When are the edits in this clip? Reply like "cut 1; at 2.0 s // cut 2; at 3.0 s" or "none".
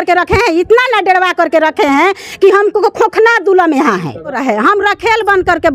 cut 1; at 4.4 s